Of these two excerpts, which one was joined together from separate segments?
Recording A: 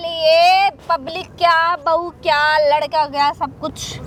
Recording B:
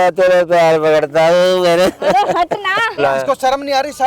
B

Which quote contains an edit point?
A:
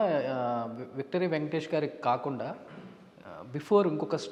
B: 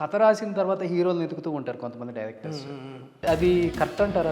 B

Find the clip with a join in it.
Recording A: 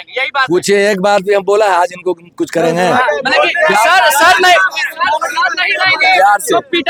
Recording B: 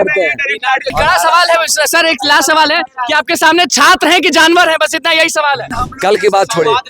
B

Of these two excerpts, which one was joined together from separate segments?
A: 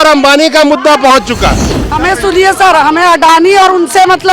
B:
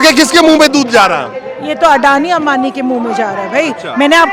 A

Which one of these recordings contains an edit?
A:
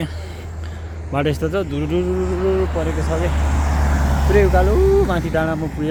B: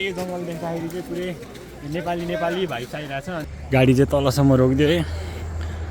B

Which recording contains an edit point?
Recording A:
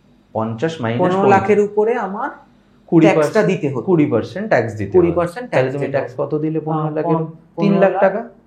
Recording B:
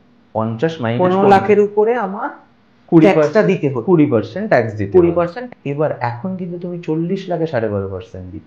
B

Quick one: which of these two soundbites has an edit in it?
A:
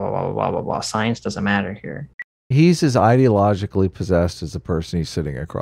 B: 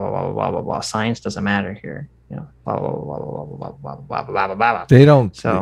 A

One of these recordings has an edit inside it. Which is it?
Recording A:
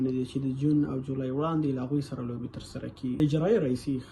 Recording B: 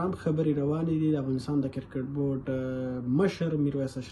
A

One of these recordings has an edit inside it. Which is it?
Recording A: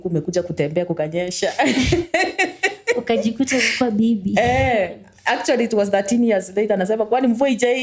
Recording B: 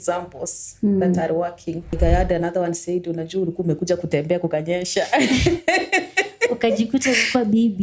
B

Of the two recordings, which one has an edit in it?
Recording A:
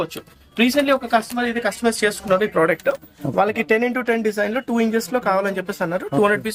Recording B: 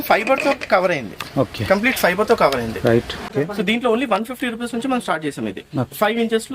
B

